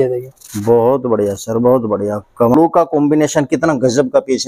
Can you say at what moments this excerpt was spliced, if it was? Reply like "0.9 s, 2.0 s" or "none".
2.5 s